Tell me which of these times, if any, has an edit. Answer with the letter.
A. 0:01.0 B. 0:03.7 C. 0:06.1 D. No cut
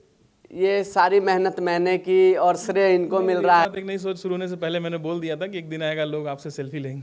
B